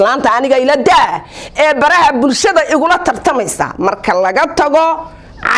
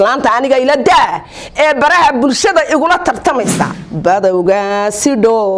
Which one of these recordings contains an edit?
second; 1 cut; at 3.7 s

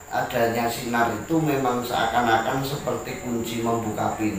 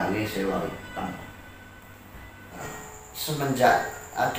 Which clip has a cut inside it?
second; 1 cut; at 2.7 s

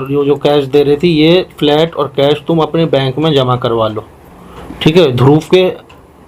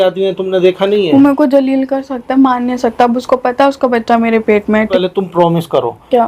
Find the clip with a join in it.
second; 1 cut; at 4.9 s

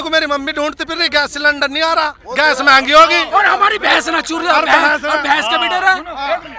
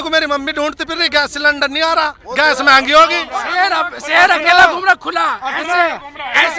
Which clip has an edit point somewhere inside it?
second; 1 cut; at 3.2 s

